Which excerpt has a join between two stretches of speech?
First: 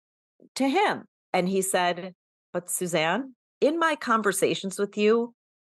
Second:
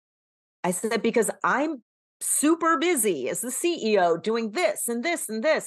first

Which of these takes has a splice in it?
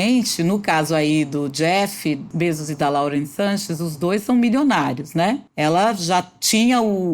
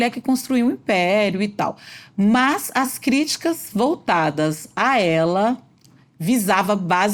first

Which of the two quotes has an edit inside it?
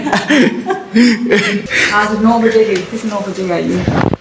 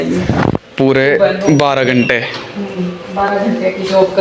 first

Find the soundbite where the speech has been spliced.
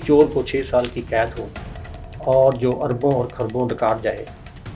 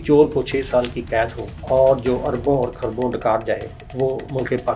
second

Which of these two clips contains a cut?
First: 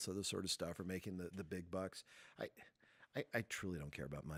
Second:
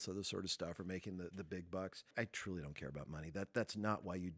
second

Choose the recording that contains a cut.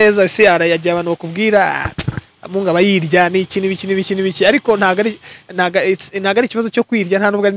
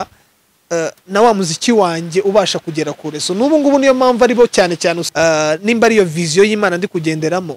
second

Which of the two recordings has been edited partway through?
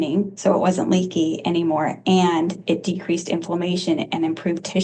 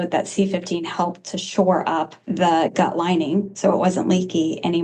second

